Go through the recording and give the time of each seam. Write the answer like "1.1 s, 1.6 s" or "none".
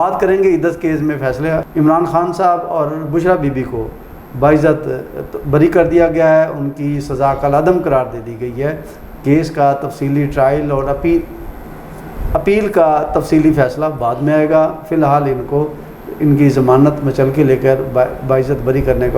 1.7 s